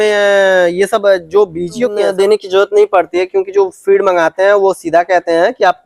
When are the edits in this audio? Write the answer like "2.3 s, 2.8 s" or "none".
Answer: 2.0 s